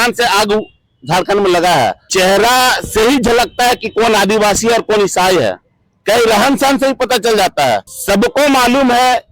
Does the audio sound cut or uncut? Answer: cut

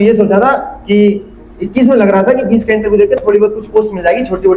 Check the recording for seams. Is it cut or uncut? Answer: uncut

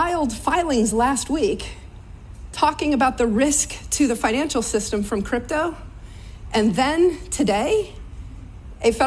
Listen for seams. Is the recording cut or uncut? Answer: cut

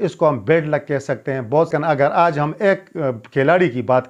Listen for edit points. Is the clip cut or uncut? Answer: cut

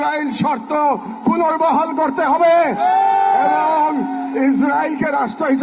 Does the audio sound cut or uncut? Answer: uncut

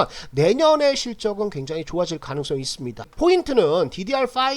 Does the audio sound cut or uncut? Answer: cut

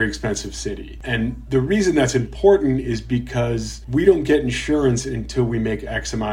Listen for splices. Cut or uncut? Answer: uncut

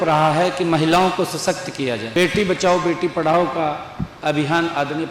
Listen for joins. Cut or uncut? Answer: cut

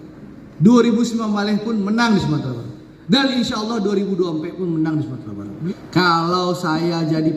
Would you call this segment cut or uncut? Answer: cut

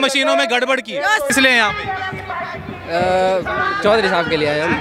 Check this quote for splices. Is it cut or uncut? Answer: cut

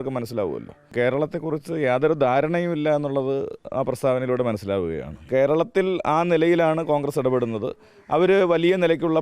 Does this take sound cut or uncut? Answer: cut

